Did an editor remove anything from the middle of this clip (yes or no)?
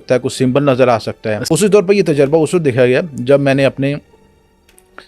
yes